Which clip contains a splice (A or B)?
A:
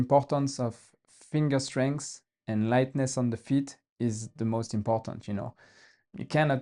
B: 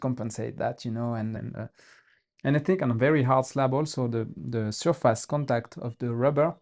B